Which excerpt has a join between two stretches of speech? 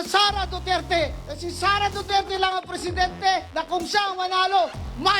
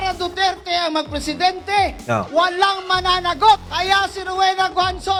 first; 1 cut; at 3.5 s

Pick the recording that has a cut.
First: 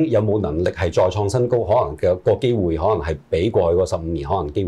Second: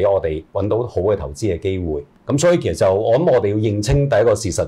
second; 1 cut; at 2.1 s

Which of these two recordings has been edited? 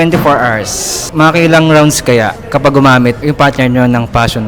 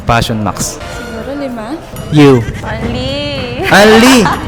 second; 1 cut; at 1.9 s

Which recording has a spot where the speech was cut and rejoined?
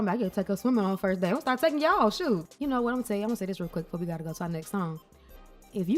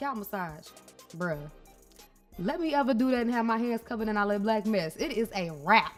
first; 1 cut; at 2.4 s

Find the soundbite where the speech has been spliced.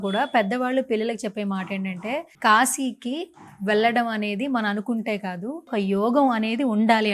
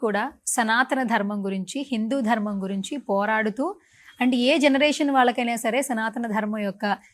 first; 2 cuts; at 2.3 s, 5.7 s

